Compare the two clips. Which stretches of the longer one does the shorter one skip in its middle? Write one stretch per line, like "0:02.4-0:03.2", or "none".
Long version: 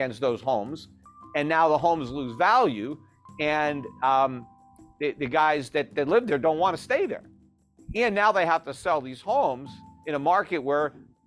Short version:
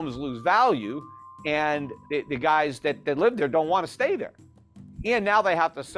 0:03.9-0:04.8